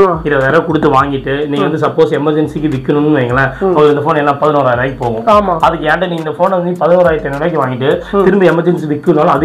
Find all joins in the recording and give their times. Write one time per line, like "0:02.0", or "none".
none